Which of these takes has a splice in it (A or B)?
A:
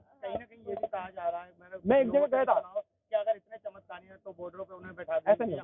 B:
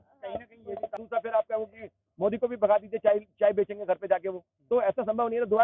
B